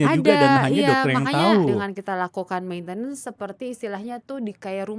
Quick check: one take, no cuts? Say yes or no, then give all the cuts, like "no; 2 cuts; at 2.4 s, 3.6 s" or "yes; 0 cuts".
no; 1 cut; at 1.7 s